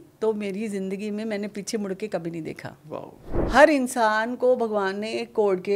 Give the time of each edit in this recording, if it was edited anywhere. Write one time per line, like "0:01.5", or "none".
0:03.3

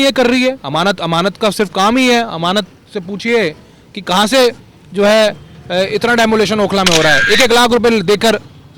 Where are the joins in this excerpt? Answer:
none

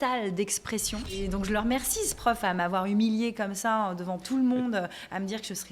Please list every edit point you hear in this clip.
0:01.2

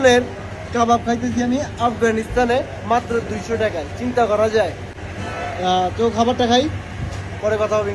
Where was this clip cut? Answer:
none

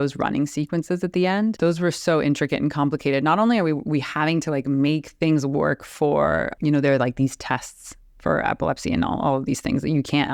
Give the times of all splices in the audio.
0:01.6
0:06.5

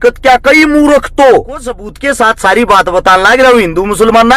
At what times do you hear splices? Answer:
0:01.9

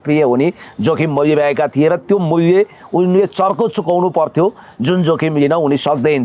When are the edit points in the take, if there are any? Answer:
none

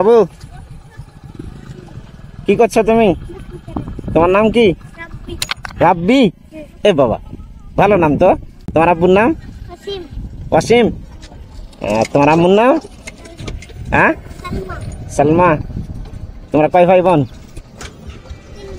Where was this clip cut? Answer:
none

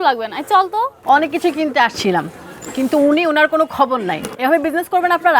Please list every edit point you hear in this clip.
0:01.0

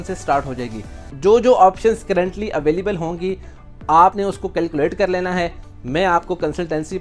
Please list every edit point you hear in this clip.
0:01.0

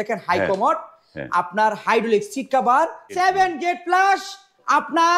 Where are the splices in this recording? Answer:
0:03.1

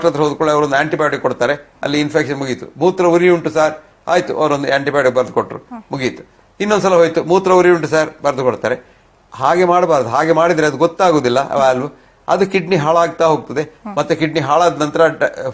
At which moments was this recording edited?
none

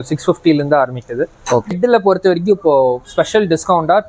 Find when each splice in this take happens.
0:01.7

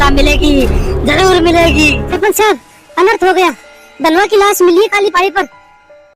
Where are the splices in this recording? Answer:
0:02.1

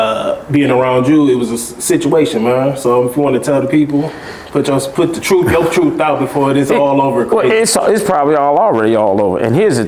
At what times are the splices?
none

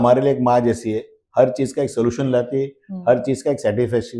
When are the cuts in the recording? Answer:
none

